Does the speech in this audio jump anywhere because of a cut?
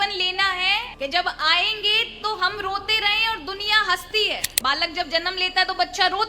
yes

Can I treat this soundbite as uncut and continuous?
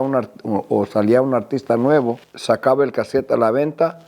no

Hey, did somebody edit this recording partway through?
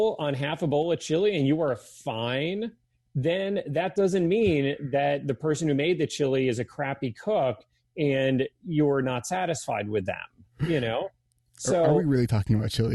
no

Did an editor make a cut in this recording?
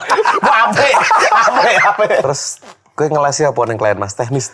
yes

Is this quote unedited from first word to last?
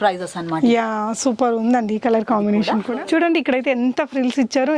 no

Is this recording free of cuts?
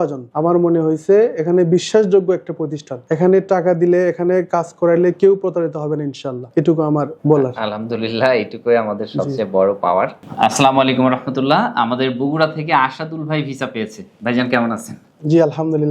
no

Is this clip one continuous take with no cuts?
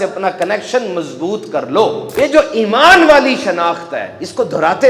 no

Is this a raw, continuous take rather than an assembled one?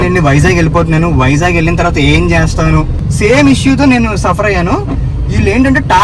no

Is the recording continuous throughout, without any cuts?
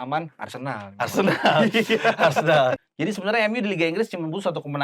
no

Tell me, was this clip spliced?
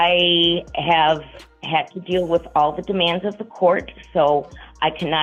no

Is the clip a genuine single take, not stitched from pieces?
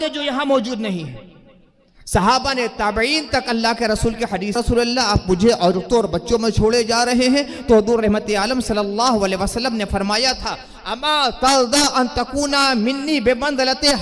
no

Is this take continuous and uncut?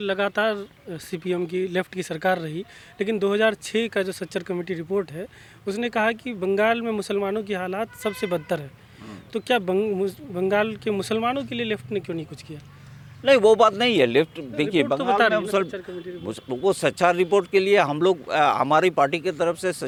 yes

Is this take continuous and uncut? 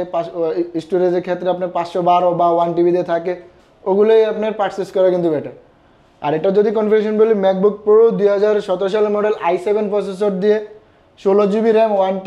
yes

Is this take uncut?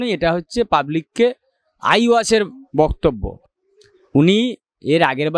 yes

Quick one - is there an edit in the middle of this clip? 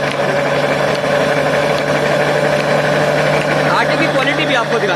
no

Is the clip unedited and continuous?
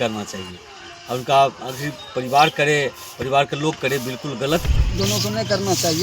no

